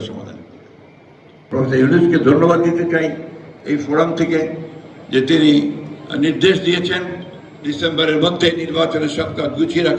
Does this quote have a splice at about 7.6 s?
no; 1 cut; at 1.4 s

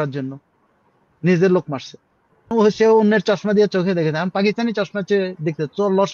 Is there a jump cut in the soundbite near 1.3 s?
no; 1 cut; at 2.5 s

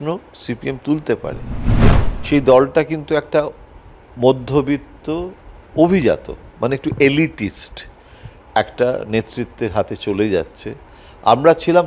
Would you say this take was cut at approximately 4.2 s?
no; 1 cut; at 1.9 s

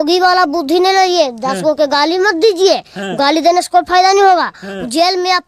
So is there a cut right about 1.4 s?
no; 0 cuts

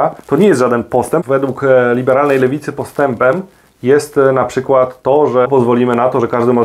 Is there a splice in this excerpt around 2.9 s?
no; 2 cuts; at 1.2 s, 5.5 s

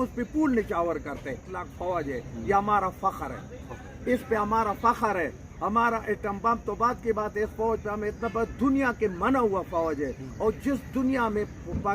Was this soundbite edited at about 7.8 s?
no; 1 cut; at 1.6 s

